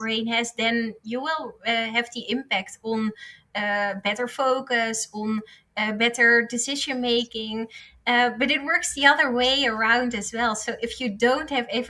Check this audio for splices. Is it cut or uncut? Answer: uncut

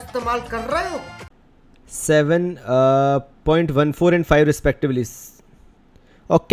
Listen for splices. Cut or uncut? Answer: uncut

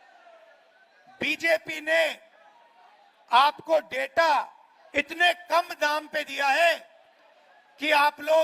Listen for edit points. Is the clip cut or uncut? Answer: uncut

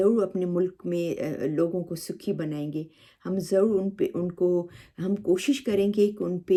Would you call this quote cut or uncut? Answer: uncut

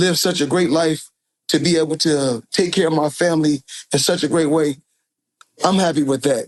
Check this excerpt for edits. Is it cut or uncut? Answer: uncut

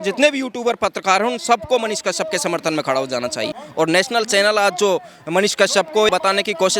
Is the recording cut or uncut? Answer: cut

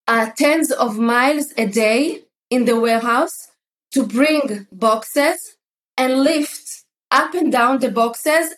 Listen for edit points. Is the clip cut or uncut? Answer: uncut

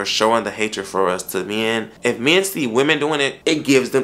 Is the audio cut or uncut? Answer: uncut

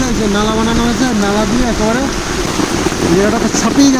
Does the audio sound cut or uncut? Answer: cut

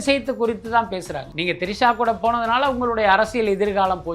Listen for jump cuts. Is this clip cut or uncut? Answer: cut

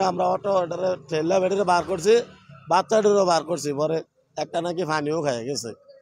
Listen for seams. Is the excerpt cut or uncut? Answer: uncut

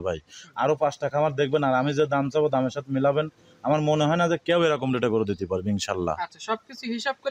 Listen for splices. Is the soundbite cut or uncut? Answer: uncut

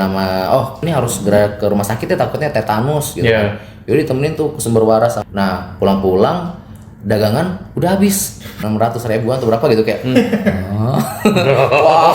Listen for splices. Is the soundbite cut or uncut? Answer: cut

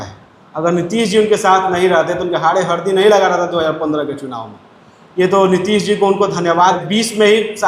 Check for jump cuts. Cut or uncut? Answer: cut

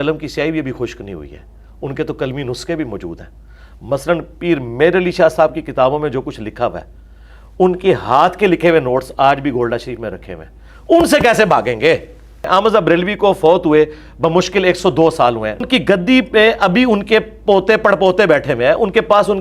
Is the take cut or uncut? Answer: cut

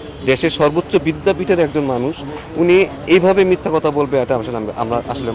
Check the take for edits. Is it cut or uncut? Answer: uncut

